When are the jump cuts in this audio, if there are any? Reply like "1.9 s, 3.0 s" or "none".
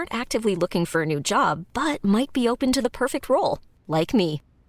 none